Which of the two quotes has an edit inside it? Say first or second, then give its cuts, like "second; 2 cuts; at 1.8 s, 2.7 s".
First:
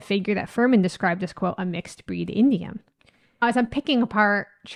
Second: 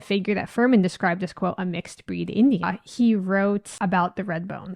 second; 2 cuts; at 2.8 s, 3.7 s